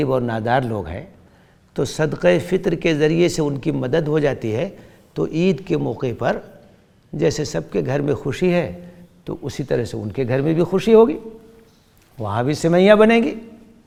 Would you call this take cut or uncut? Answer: uncut